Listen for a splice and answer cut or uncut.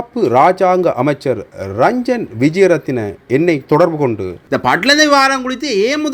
cut